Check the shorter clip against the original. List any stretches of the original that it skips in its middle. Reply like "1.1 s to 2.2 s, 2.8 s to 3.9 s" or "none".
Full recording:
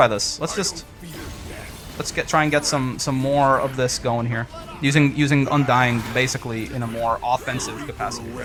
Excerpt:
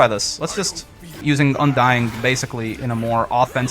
1.2 s to 5.1 s